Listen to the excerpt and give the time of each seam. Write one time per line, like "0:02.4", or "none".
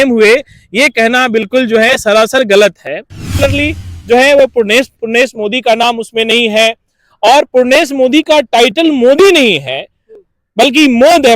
0:03.3